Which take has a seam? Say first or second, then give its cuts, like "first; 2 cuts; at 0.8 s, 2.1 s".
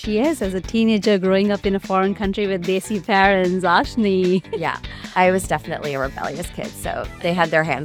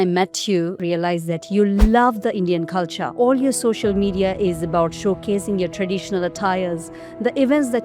second; 2 cuts; at 0.8 s, 3.0 s